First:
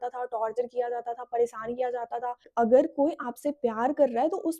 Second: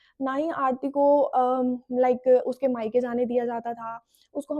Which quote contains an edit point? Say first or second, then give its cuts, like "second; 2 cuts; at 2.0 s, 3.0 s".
first; 1 cut; at 2.4 s